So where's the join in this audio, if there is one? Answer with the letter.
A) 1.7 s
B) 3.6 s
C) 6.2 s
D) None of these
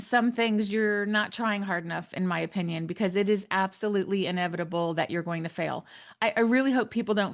D